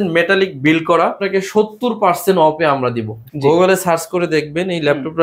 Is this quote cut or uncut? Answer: cut